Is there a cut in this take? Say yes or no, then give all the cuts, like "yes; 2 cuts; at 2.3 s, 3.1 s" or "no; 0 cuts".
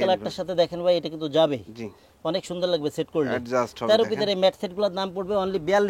no; 0 cuts